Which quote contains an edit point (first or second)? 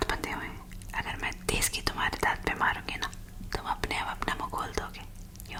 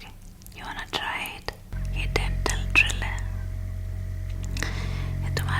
second